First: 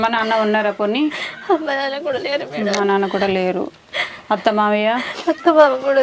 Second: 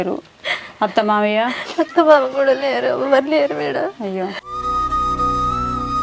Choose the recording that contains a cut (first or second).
second